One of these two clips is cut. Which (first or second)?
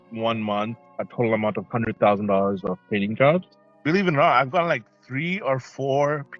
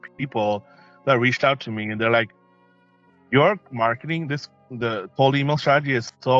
first